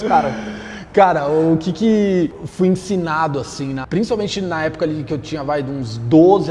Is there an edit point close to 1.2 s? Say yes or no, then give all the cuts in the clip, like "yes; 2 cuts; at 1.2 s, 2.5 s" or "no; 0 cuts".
no; 0 cuts